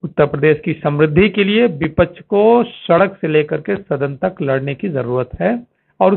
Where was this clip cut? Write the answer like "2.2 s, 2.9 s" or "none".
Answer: none